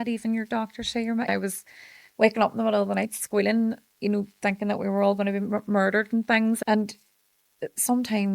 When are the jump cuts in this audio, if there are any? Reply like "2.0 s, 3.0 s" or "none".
1.3 s, 6.6 s